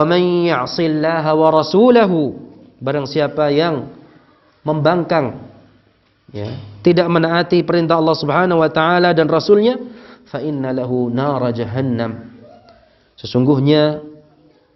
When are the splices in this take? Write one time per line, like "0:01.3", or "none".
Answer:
none